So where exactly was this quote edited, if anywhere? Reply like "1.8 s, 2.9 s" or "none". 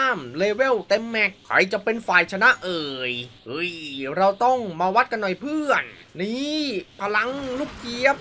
none